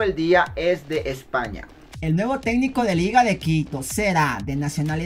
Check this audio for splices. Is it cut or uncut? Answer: uncut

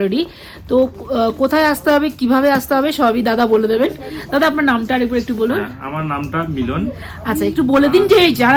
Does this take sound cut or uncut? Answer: uncut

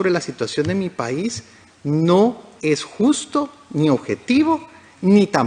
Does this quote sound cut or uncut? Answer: uncut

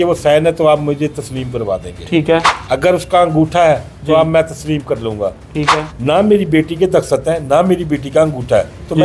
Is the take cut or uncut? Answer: uncut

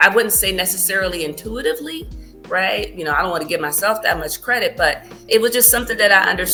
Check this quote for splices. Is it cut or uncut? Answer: uncut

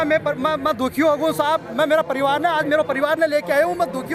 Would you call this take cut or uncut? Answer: uncut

